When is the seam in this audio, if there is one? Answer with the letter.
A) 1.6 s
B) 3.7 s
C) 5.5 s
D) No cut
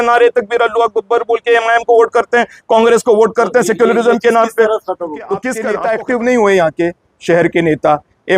C